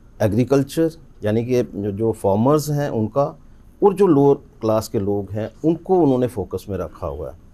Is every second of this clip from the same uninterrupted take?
yes; 0 cuts

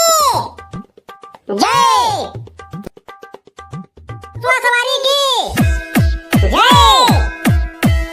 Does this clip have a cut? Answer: yes; 1 cut; at 4.4 s

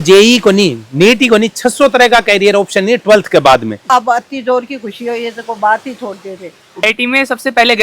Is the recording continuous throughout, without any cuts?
no; 2 cuts; at 3.8 s, 6.8 s

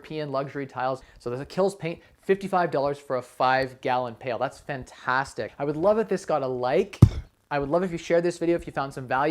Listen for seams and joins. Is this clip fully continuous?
no; 2 cuts; at 1.1 s, 5.5 s

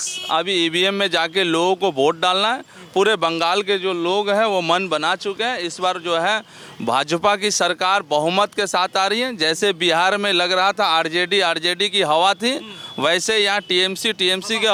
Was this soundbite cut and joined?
no; 0 cuts

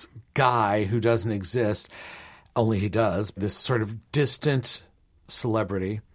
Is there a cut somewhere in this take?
yes; 2 cuts; at 3.4 s, 5.2 s

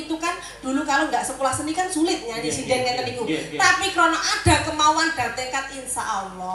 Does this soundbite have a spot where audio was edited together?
no; 0 cuts

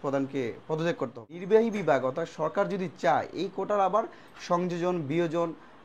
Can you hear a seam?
yes; 1 cut; at 1.4 s

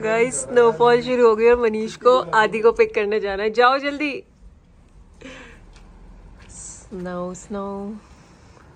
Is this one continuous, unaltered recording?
yes; 0 cuts

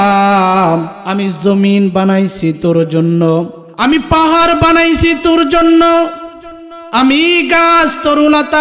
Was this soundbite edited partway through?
yes; 2 cuts; at 1.0 s, 3.6 s

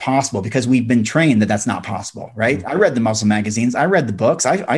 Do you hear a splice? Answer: no; 0 cuts

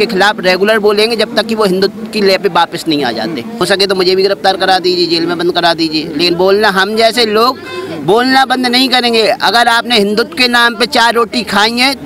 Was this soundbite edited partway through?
yes; 1 cut; at 3.6 s

